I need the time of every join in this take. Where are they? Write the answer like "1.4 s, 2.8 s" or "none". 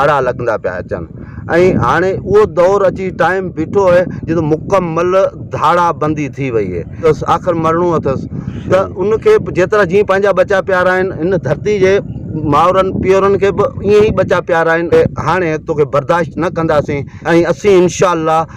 7.0 s, 14.9 s, 17.1 s